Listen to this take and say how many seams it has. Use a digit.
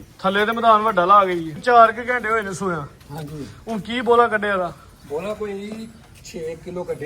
1